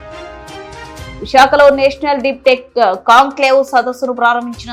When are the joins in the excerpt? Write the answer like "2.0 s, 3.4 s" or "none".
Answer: 1.1 s